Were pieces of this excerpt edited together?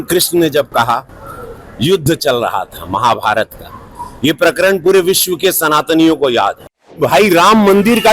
yes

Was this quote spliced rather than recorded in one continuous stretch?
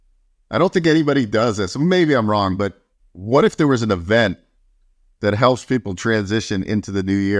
no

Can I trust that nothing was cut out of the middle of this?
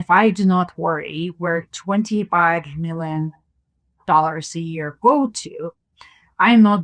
yes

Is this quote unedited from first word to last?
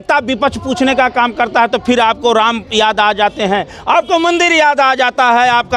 yes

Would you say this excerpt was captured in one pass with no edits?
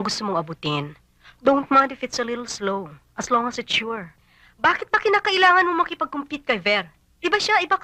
yes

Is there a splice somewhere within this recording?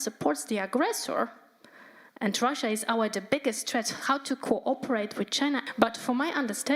yes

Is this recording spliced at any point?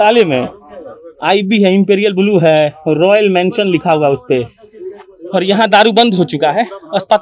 no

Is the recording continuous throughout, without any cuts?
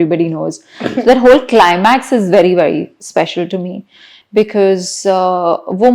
yes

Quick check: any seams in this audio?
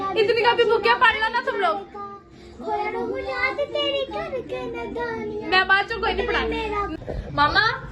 yes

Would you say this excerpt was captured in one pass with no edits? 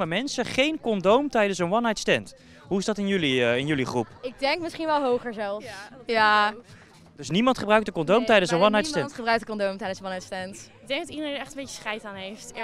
no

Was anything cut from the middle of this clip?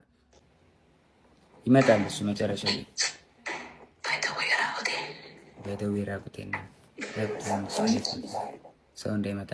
no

